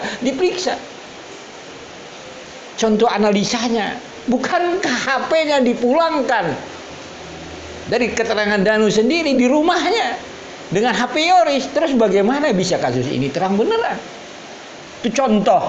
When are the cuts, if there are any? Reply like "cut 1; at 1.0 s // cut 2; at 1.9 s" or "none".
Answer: none